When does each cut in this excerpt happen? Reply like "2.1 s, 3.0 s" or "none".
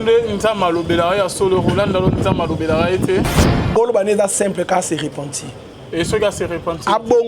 3.3 s